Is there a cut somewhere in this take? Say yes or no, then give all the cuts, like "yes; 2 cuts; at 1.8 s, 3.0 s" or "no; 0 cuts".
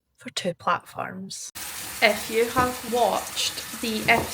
yes; 2 cuts; at 1.5 s, 2.8 s